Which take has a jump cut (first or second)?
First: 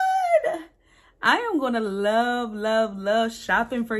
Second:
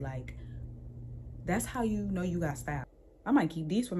second